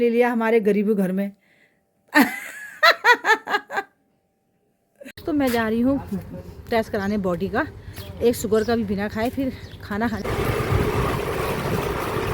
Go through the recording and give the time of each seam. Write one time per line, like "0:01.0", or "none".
0:05.2
0:10.2